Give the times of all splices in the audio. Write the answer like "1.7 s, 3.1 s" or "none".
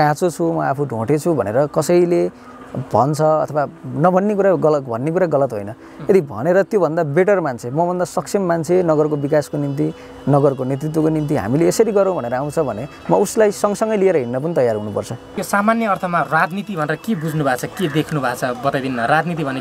15.3 s